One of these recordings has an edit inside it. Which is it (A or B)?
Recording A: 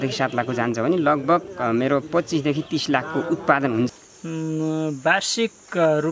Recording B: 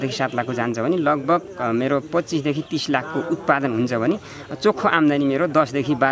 A